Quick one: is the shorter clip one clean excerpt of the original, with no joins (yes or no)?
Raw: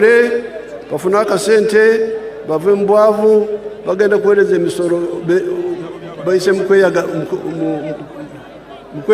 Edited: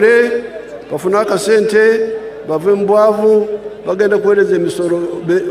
yes